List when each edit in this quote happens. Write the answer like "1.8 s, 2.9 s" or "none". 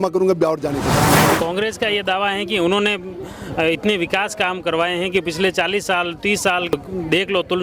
1.1 s, 6.7 s